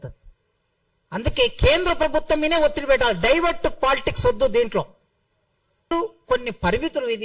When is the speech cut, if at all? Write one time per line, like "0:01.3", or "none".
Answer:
0:05.9

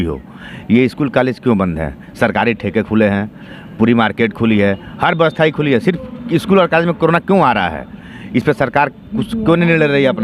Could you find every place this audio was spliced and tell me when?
none

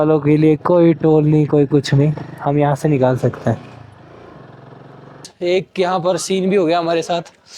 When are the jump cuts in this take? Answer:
0:05.3

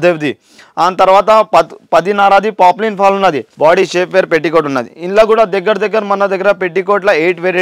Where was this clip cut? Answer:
0:03.5

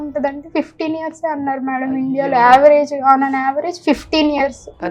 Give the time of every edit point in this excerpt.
none

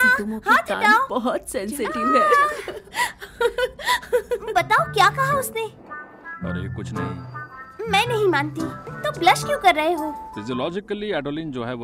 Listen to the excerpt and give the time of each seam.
0:04.5
0:08.8
0:10.3

